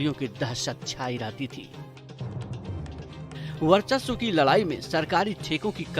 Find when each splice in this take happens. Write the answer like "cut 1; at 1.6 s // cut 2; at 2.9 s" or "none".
cut 1; at 1.6 s // cut 2; at 3.6 s